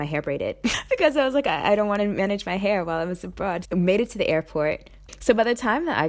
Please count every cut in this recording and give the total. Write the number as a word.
two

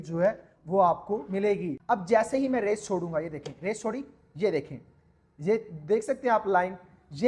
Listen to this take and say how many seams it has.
one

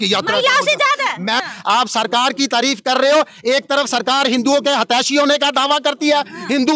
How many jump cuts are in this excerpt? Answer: one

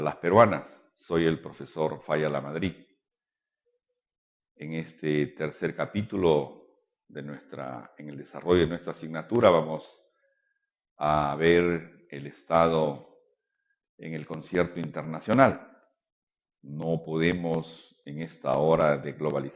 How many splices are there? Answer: one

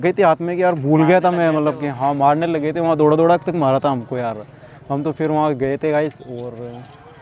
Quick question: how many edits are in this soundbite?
zero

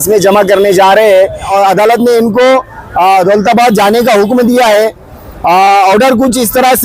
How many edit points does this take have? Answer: one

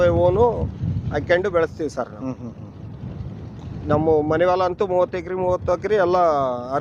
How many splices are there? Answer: zero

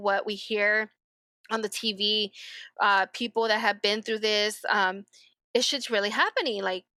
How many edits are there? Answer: zero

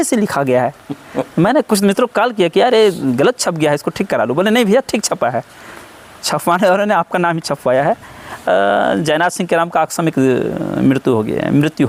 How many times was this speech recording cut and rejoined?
zero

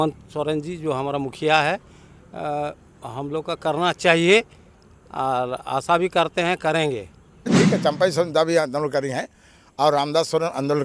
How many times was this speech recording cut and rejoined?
one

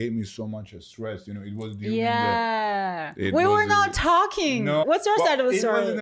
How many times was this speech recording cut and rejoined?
one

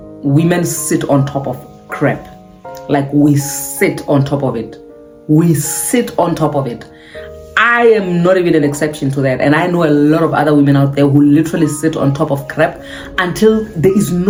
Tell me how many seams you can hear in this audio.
zero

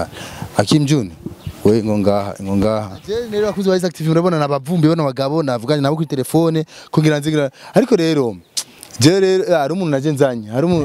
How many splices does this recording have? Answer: one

